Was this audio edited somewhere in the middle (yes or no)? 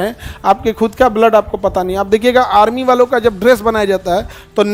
no